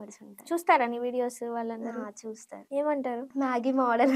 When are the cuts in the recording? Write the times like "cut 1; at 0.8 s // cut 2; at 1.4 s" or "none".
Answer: cut 1; at 2.5 s // cut 2; at 3.3 s